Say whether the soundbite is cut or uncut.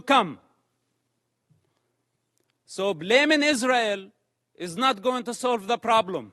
uncut